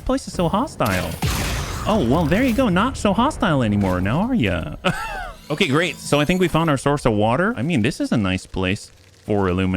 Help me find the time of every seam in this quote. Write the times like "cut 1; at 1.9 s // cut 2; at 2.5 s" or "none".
cut 1; at 7.6 s